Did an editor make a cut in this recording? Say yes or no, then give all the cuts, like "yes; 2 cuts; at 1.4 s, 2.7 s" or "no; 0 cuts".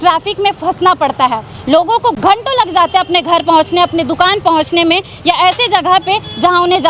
no; 0 cuts